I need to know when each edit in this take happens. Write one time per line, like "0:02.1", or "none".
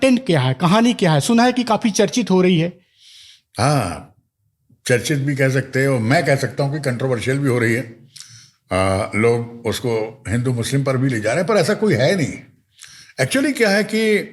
none